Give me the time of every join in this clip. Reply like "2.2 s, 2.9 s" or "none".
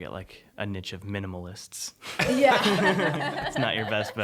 none